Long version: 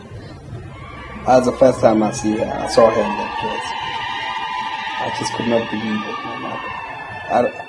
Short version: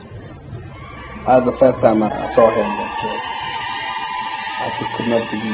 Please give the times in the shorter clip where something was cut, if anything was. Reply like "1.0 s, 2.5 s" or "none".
2.2 s